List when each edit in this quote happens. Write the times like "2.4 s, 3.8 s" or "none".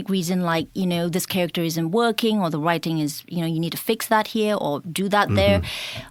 none

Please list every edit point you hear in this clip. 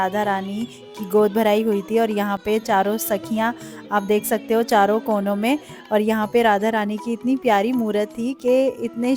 none

